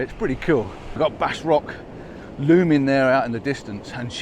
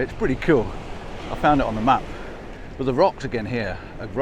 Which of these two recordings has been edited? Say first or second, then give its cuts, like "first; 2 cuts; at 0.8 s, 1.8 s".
first; 1 cut; at 0.9 s